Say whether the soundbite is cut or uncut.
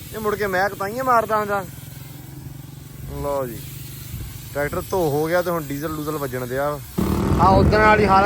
cut